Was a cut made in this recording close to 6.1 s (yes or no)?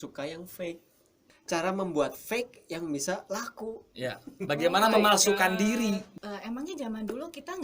yes